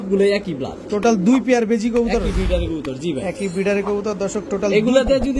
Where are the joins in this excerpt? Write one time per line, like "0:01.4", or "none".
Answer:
none